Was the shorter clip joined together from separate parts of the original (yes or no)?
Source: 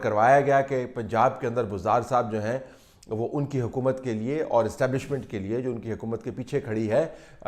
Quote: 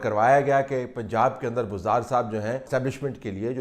yes